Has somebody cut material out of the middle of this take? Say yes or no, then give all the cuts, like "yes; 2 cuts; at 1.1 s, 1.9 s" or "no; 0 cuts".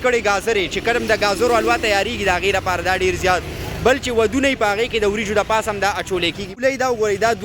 yes; 1 cut; at 6.6 s